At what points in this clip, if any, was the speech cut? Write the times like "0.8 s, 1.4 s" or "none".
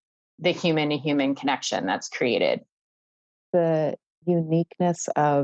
3.1 s

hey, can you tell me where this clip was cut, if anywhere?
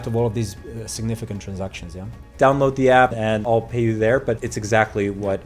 2.2 s, 3.4 s, 4.5 s

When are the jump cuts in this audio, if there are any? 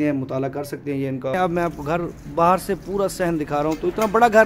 1.3 s

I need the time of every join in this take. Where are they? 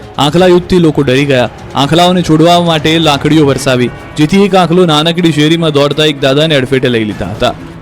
5.7 s

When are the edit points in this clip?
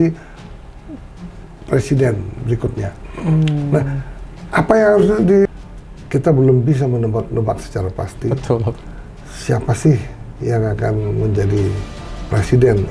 5.5 s

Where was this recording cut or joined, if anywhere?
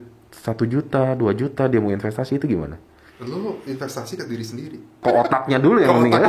5.0 s

